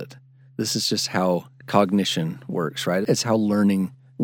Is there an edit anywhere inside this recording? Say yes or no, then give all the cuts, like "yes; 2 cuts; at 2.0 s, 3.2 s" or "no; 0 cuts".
yes; 1 cut; at 3.1 s